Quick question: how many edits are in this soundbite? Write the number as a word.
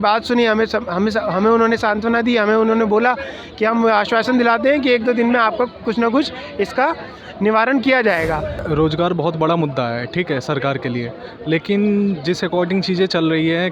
one